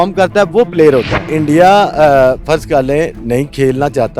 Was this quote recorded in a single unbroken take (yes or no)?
no